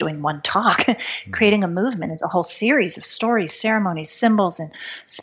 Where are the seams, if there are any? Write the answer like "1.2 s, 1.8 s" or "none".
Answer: none